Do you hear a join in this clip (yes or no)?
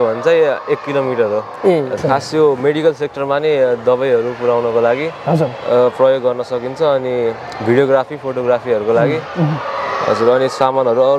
yes